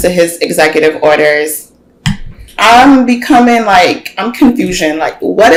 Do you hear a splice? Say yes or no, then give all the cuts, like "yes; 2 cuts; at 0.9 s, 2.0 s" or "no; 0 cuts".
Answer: no; 0 cuts